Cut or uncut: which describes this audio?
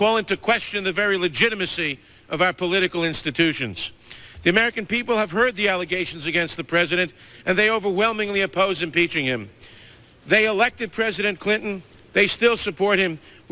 uncut